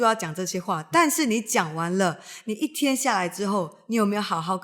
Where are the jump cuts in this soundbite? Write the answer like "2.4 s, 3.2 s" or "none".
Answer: none